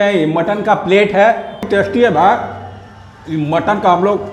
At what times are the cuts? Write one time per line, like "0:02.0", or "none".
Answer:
0:01.6